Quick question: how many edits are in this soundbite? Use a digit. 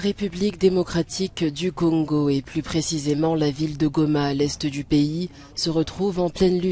0